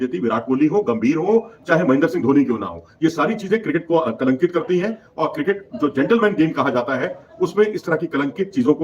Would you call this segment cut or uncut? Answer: uncut